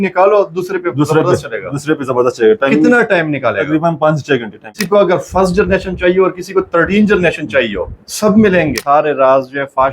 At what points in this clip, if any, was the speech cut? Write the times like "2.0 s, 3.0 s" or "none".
4.8 s, 8.8 s